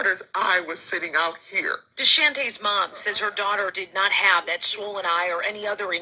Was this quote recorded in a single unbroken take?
no; 1 cut; at 3.1 s

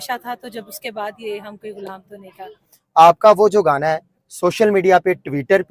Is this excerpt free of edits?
no; 1 cut; at 2.6 s

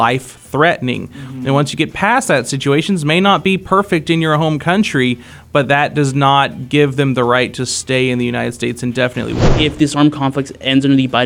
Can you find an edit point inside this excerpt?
yes; 1 cut; at 9.4 s

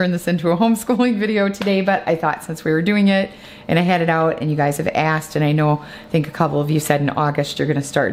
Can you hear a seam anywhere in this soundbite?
no; 0 cuts

